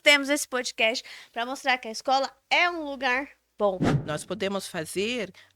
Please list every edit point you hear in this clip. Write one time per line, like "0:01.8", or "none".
0:03.9